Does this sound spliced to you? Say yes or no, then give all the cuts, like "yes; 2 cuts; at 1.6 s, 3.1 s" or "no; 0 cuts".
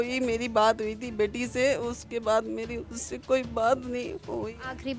no; 0 cuts